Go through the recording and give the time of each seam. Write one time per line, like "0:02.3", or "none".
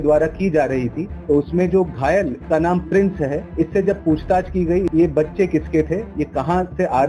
0:01.1
0:02.4
0:03.5
0:04.9
0:06.1